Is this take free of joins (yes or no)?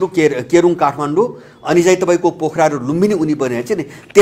yes